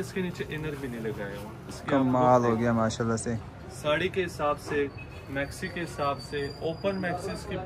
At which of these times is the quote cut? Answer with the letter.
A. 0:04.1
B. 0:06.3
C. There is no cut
C